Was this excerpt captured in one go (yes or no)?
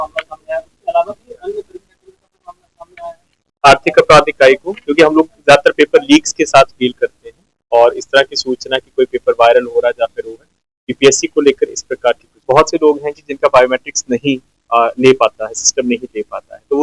no